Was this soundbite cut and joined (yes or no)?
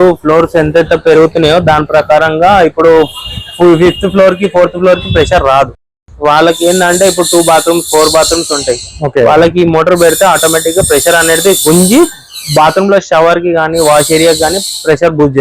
no